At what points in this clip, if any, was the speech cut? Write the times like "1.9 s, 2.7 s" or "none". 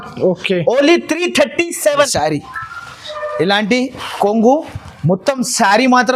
2.1 s

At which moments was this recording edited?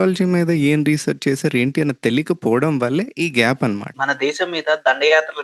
3.9 s

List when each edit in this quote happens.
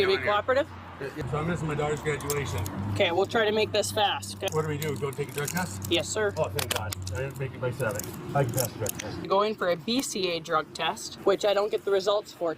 1.1 s, 4.5 s, 8.1 s, 9.2 s, 11.1 s

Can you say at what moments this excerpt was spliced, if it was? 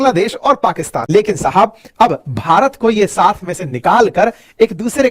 1.0 s

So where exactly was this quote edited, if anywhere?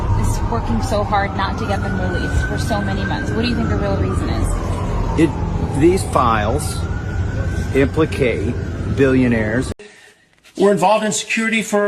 9.7 s

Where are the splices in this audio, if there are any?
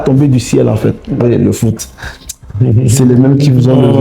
1.2 s

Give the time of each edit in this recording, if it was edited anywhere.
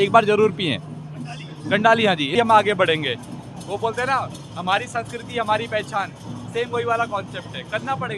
2.3 s

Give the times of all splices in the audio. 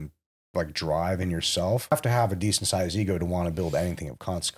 1.9 s

